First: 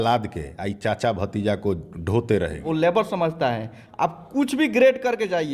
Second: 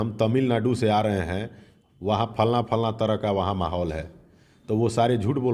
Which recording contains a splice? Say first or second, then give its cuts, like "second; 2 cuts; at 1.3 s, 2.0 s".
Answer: first; 1 cut; at 2.6 s